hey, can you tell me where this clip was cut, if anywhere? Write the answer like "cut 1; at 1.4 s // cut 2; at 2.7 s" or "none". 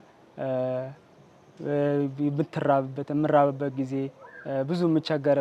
none